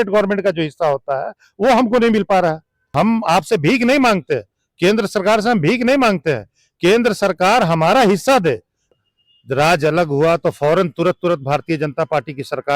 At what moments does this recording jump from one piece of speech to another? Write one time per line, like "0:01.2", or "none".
0:02.9
0:08.9